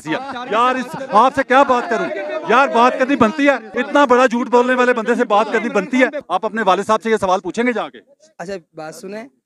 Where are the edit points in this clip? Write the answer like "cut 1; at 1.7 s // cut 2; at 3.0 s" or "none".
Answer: cut 1; at 3.7 s // cut 2; at 6.2 s

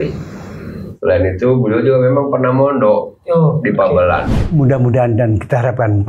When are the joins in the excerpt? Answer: cut 1; at 4.3 s

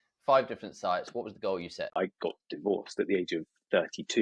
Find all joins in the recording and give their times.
cut 1; at 1.8 s

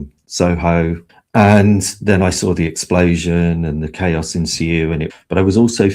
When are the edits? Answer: cut 1; at 1.1 s // cut 2; at 5.1 s

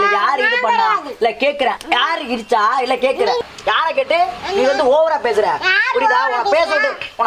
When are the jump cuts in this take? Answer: none

